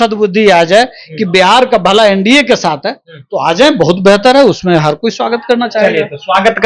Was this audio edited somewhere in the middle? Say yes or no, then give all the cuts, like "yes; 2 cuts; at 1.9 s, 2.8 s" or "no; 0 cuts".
no; 0 cuts